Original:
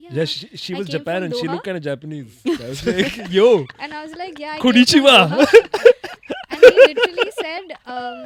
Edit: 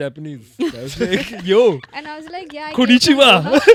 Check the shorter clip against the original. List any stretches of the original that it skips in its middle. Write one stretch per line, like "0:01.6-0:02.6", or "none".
none